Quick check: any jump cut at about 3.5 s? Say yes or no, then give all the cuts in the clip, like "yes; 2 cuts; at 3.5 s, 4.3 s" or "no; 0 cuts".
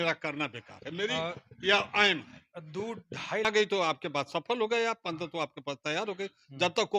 yes; 1 cut; at 3.5 s